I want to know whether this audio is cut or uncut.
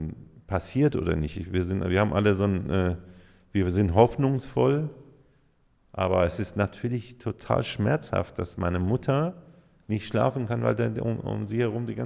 uncut